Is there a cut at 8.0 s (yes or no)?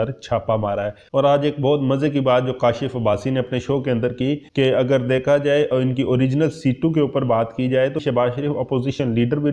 yes